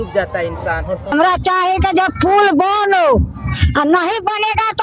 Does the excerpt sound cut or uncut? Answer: cut